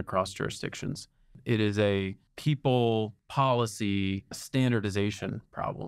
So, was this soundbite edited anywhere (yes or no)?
yes